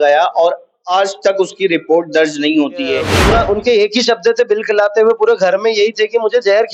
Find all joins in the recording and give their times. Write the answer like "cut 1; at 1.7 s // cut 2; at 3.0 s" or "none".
cut 1; at 3.1 s

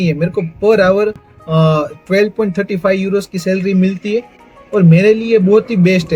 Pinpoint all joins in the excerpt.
none

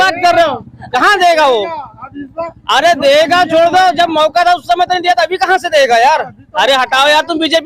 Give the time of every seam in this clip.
none

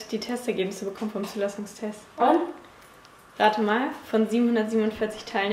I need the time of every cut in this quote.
none

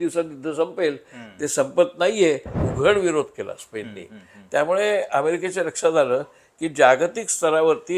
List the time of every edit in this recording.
cut 1; at 2.5 s

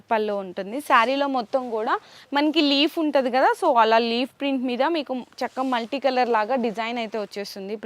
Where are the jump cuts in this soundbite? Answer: none

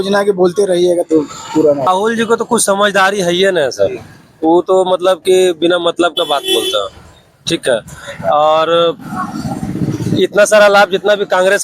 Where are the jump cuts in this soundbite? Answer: cut 1; at 1.9 s

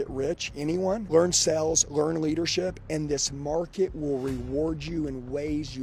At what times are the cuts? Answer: none

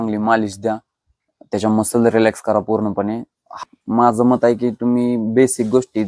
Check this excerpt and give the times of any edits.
cut 1; at 3.6 s

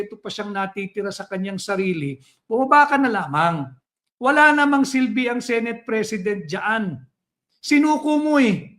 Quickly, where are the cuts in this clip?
none

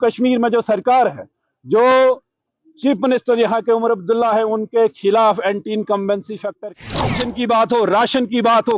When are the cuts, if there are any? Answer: cut 1; at 6.9 s

